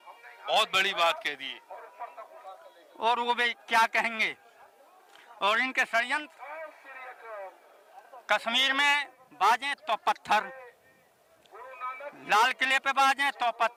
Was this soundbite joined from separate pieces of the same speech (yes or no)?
no